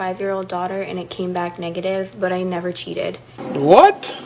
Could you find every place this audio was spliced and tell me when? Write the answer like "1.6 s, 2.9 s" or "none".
3.3 s